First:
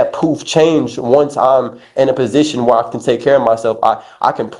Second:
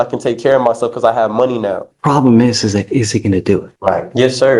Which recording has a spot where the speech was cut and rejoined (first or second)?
second